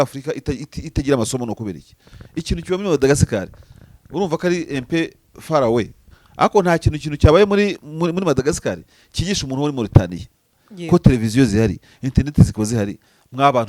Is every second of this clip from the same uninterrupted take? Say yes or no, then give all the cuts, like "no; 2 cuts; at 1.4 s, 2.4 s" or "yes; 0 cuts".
yes; 0 cuts